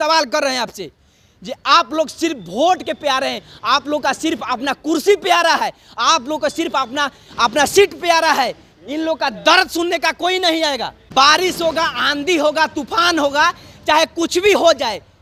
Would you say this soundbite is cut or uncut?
uncut